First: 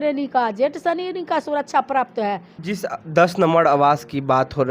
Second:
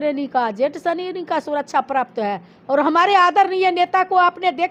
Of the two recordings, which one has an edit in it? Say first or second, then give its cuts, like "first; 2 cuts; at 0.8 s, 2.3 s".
first; 1 cut; at 2.5 s